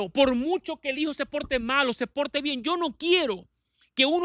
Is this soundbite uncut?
yes; 0 cuts

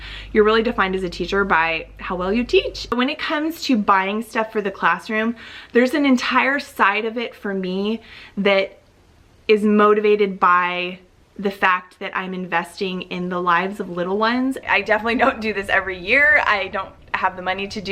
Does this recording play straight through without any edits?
no; 2 cuts; at 2.9 s, 14.6 s

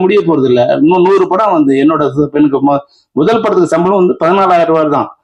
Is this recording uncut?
yes; 0 cuts

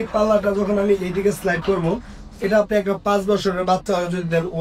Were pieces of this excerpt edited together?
no; 0 cuts

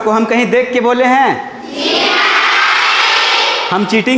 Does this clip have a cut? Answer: no; 0 cuts

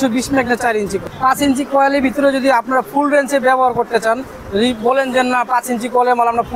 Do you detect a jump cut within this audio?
yes; 1 cut; at 1.1 s

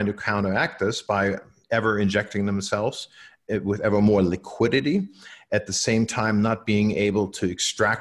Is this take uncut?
no; 1 cut; at 1.5 s

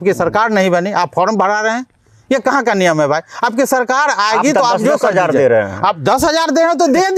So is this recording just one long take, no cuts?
yes; 0 cuts

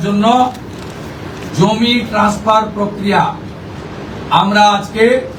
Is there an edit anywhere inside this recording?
no; 0 cuts

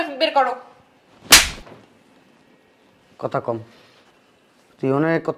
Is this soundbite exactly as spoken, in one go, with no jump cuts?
yes; 0 cuts

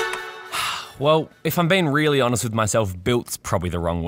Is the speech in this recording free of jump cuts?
no; 1 cut; at 1.0 s

